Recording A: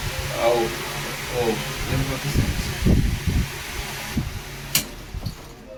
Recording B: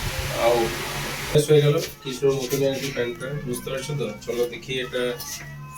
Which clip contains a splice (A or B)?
B